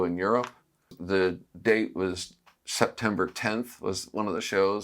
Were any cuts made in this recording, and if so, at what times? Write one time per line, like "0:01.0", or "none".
0:01.0

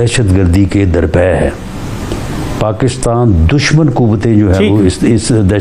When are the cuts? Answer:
none

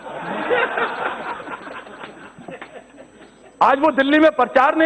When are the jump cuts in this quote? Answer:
none

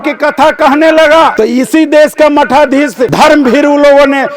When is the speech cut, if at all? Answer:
0:01.3
0:03.1

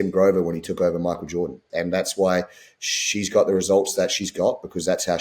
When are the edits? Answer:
0:01.6

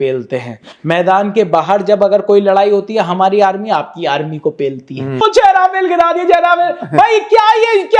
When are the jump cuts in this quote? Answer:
0:05.1

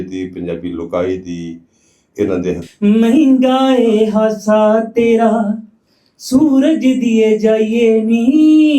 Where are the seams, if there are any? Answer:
0:02.7

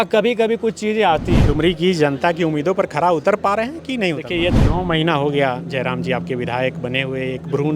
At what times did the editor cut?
0:01.4
0:04.5

